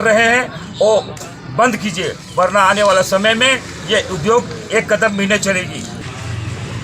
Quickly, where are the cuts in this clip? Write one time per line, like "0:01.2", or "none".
0:05.9